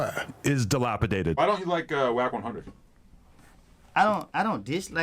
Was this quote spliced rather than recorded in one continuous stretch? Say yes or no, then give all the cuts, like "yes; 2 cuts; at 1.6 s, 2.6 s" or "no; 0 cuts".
yes; 1 cut; at 1.4 s